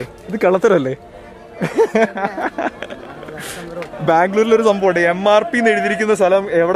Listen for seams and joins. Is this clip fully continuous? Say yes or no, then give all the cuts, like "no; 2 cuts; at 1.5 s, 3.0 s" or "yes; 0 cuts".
no; 1 cut; at 4.0 s